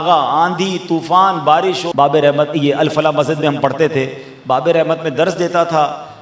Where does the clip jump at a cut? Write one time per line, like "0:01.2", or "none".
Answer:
0:01.8